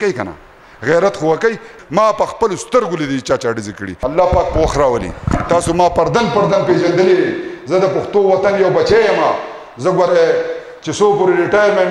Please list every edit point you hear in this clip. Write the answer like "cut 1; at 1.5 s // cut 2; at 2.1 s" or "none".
cut 1; at 1.7 s // cut 2; at 3.9 s

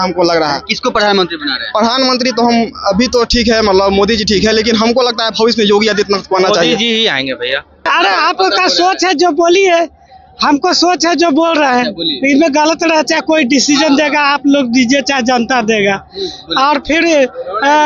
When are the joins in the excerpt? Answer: cut 1; at 7.9 s

